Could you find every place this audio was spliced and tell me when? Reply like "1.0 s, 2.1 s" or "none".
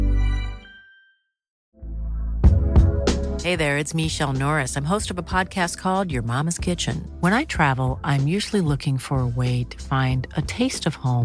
1.6 s